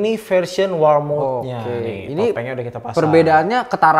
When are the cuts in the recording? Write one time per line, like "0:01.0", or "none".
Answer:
none